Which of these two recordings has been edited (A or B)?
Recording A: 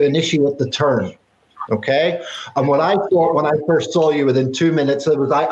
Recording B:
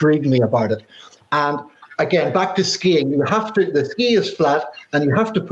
B